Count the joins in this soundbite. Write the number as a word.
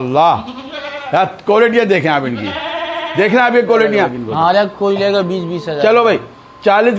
one